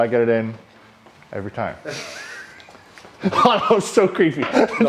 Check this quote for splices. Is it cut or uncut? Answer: uncut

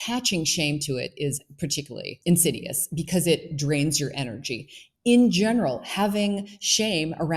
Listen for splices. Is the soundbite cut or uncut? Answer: cut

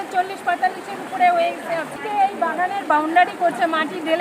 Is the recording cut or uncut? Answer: cut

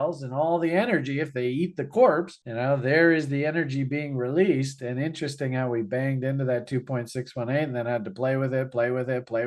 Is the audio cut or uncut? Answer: uncut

